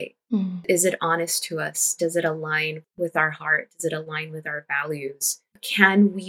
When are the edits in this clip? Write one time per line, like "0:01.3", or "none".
none